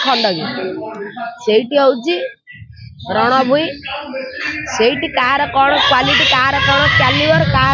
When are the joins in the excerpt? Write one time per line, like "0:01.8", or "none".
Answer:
none